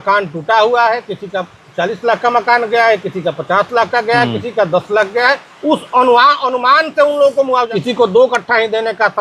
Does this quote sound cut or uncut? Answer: cut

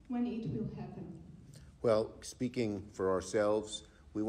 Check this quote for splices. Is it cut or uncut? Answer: cut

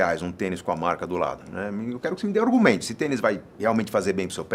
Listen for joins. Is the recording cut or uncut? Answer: uncut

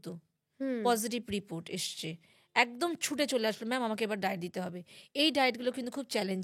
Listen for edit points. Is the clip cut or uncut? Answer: uncut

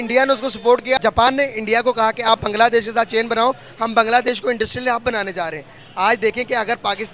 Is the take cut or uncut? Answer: cut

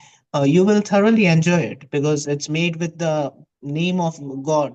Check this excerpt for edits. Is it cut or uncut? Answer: uncut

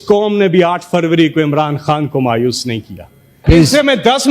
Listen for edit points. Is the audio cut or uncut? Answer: cut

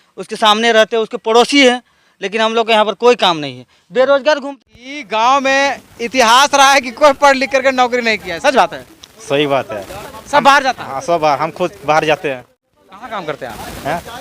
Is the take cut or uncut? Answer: cut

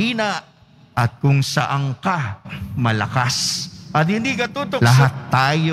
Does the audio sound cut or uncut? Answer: cut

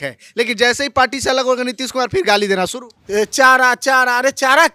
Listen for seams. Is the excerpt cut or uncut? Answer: cut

